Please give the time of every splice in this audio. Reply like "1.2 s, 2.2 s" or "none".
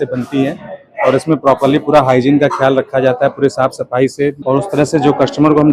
4.4 s